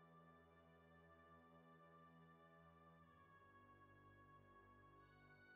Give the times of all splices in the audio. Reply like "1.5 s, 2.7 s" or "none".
none

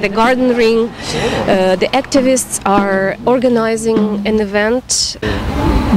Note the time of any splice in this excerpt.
5.0 s

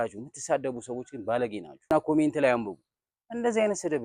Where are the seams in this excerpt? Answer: 1.9 s

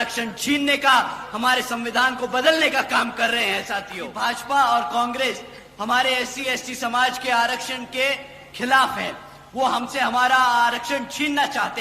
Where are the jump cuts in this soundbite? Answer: 4.0 s

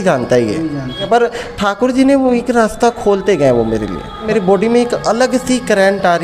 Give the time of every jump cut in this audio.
1.1 s, 4.3 s

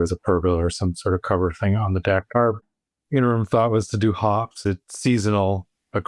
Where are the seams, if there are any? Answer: 2.6 s

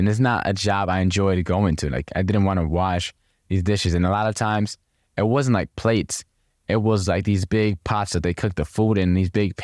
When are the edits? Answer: none

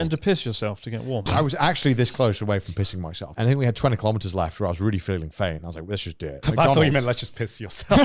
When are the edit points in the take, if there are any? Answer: 1.2 s, 3.3 s, 6.4 s

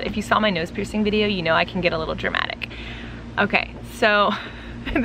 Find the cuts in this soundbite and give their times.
none

